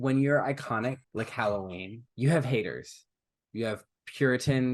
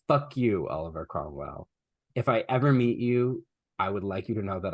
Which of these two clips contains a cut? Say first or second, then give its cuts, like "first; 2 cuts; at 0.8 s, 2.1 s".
first; 2 cuts; at 1.0 s, 2.0 s